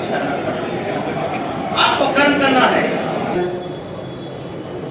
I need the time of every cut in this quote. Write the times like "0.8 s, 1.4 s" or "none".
3.4 s